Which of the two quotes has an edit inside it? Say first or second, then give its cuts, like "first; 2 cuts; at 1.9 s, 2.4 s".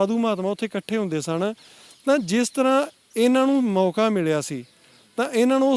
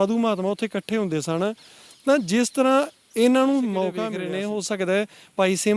second; 1 cut; at 4.0 s